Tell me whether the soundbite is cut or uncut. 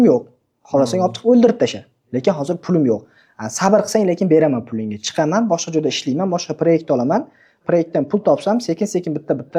uncut